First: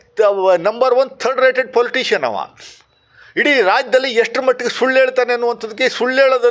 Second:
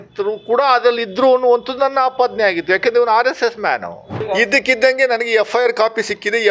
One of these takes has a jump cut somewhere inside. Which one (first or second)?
second